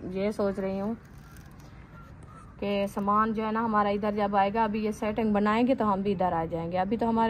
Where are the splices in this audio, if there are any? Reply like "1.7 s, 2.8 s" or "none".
none